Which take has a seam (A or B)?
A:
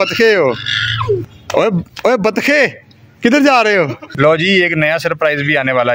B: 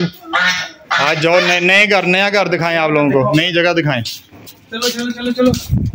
A